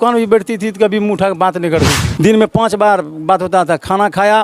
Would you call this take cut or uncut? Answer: cut